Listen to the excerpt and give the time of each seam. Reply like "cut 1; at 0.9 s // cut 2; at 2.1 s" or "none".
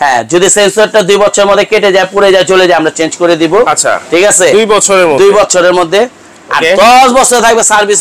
none